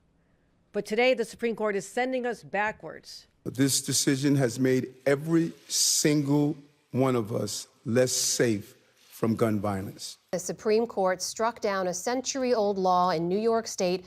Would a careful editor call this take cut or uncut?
cut